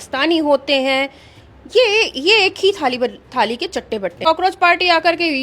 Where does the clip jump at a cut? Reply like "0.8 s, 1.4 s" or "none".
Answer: 4.3 s